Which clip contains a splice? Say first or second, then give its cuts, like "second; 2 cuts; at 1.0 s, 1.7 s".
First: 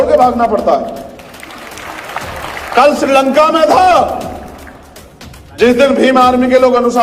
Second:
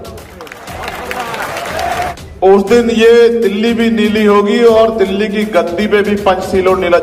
second; 1 cut; at 2.1 s